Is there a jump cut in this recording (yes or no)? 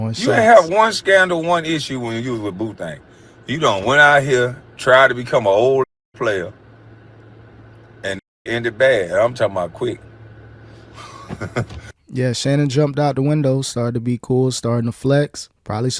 no